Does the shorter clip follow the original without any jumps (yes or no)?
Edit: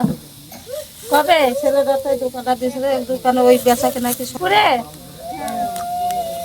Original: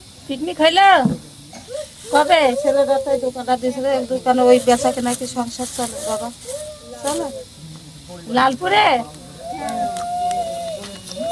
no